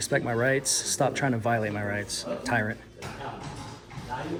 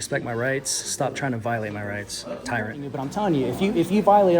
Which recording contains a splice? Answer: second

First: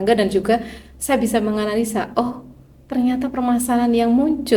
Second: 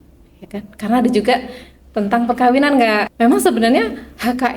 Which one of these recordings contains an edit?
second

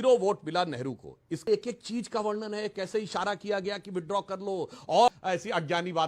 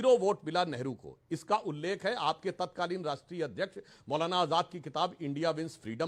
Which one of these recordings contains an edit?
first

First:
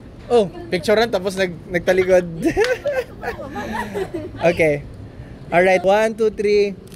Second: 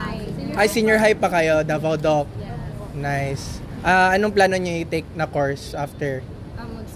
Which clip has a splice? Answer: first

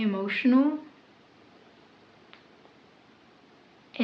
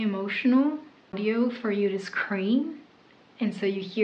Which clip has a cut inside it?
second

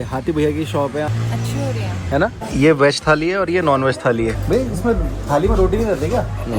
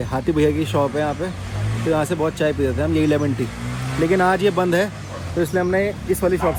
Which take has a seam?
first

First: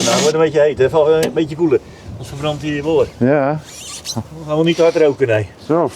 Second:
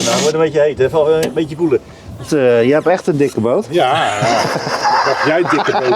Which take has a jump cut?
second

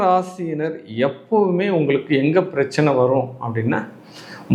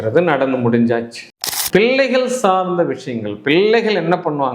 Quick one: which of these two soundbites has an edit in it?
second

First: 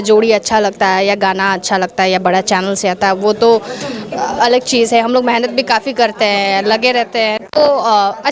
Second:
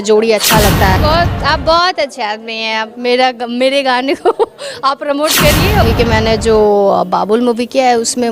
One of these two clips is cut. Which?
second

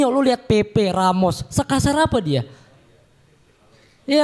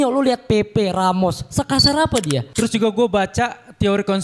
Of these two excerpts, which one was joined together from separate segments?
second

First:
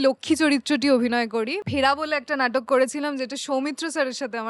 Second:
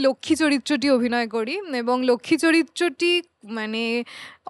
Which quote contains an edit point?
first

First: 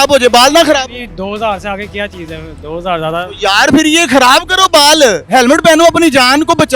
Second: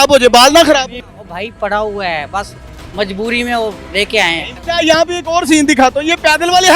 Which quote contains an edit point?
second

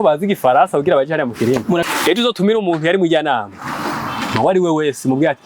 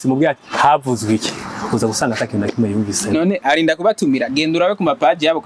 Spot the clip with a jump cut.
first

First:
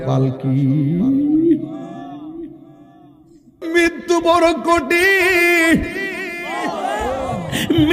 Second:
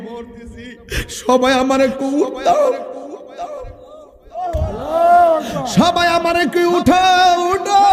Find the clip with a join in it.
first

